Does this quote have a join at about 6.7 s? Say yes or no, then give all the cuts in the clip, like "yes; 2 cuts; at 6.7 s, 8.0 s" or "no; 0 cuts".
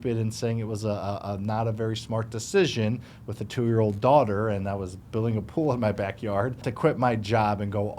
yes; 1 cut; at 6.7 s